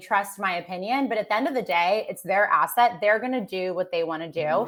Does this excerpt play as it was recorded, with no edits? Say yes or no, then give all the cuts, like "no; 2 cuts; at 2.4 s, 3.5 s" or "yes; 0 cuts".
yes; 0 cuts